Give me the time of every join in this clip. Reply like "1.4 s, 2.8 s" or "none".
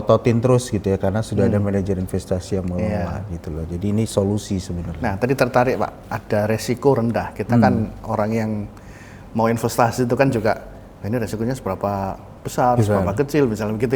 none

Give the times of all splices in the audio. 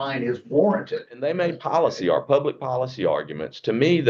1.1 s

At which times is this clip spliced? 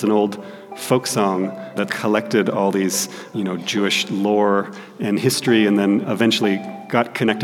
1.8 s, 3.3 s, 6.0 s

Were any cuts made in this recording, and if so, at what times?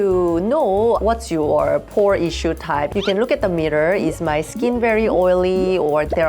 2.9 s

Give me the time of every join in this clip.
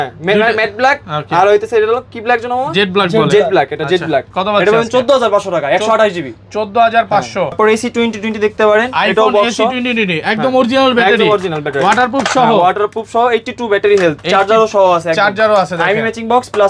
7.6 s

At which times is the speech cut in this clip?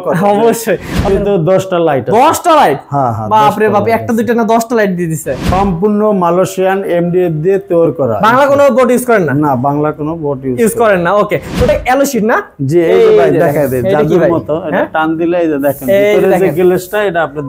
1.1 s, 5.5 s, 11.7 s

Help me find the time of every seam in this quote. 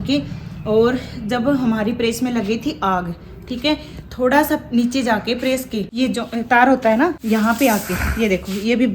5.9 s, 7.2 s

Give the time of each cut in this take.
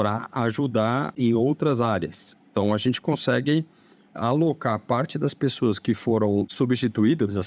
1.1 s, 6.5 s

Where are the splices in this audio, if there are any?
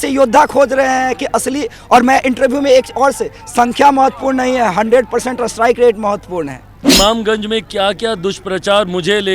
6.7 s

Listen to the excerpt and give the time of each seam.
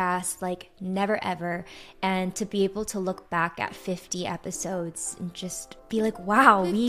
none

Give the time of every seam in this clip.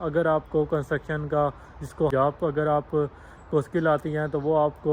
2.1 s

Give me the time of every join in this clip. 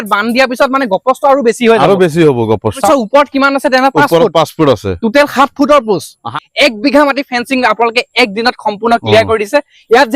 2.8 s, 6.4 s

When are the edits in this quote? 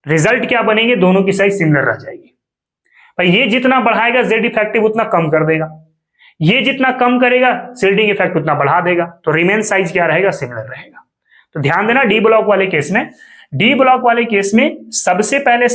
none

